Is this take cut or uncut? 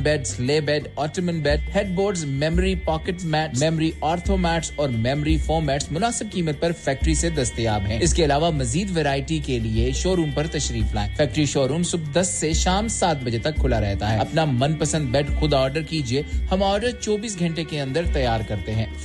uncut